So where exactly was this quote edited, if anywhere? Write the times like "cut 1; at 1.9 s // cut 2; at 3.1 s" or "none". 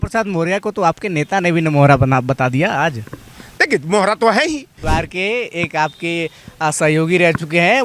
cut 1; at 4.8 s

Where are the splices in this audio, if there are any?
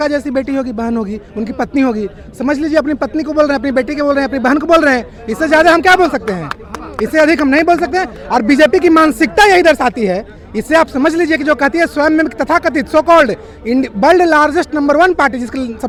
none

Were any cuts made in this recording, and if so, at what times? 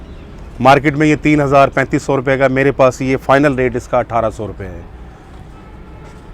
none

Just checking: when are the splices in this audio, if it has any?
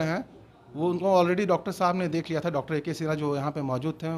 none

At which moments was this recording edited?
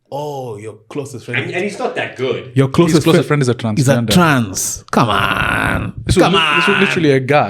none

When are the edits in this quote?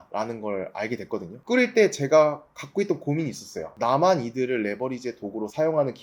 cut 1; at 1.3 s

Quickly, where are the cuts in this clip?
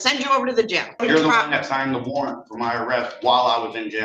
cut 1; at 1.0 s

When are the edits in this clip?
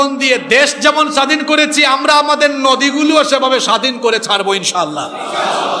none

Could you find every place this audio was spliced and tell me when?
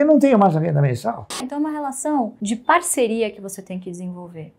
cut 1; at 1.5 s // cut 2; at 2.4 s

